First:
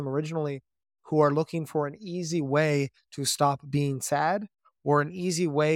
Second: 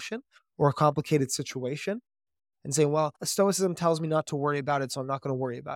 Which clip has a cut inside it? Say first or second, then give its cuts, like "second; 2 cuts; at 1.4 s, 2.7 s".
second; 2 cuts; at 2.5 s, 3.2 s